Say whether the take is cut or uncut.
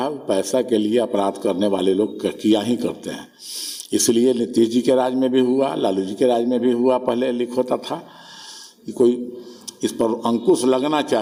uncut